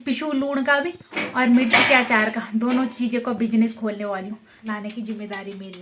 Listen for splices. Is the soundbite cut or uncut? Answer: cut